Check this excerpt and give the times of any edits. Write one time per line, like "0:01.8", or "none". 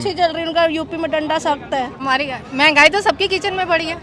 0:02.0